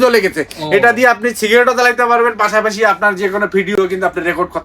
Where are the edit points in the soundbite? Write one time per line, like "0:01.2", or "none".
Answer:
0:03.7